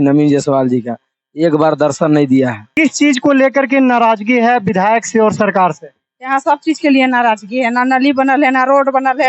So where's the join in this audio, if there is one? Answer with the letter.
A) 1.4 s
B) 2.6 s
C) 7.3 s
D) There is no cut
B